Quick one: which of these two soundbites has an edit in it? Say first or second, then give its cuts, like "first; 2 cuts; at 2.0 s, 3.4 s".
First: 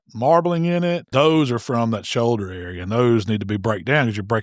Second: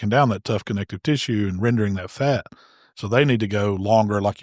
first; 1 cut; at 1.0 s